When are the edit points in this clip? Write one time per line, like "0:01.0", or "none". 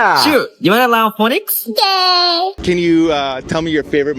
0:02.6